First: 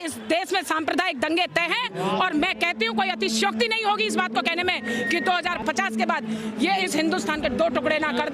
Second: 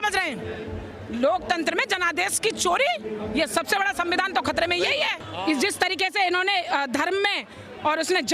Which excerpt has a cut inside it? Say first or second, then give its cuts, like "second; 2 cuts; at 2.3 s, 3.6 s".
second; 1 cut; at 5.2 s